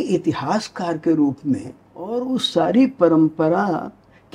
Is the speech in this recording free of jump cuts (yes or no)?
no